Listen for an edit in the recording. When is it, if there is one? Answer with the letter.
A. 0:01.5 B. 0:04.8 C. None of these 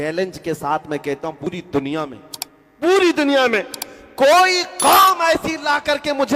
A